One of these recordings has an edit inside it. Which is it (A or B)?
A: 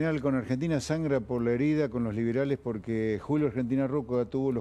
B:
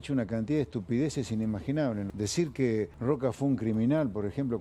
B